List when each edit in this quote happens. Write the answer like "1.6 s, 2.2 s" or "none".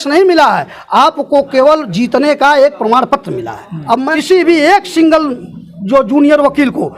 4.1 s

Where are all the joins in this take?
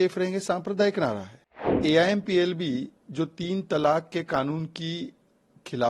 1.8 s

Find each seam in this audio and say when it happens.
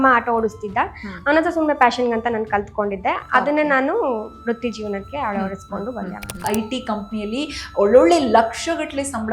6.4 s

